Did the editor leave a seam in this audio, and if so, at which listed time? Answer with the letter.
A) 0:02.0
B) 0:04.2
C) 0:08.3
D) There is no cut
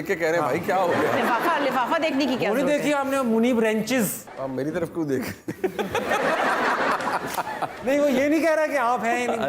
B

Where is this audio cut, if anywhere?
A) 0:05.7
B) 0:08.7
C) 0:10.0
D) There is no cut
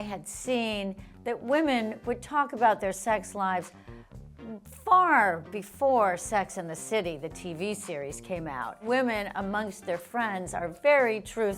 B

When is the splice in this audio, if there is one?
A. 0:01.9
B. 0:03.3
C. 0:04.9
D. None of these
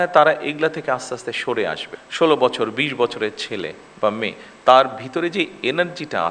A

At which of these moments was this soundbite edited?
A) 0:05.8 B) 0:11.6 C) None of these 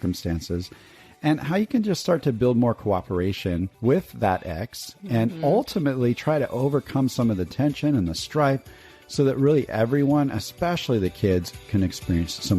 B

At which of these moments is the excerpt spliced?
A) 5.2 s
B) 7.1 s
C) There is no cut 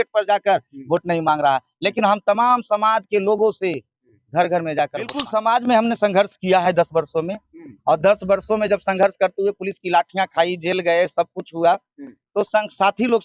A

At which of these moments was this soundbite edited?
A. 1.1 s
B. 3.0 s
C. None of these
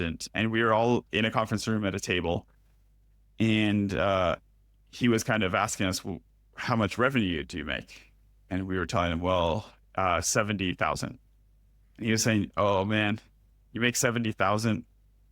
A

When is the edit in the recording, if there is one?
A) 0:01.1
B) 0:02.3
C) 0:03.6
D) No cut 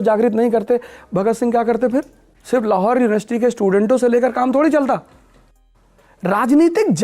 D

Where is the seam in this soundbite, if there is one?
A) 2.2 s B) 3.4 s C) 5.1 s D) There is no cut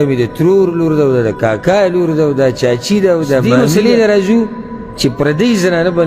B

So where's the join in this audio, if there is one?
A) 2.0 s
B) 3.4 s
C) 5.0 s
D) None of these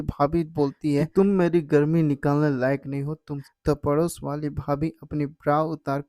B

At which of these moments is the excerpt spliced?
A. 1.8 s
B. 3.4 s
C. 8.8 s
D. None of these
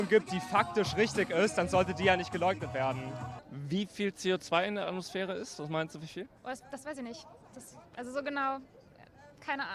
B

